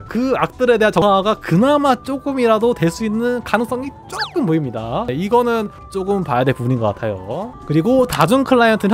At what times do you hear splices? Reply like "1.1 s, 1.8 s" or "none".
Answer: 1.0 s, 5.1 s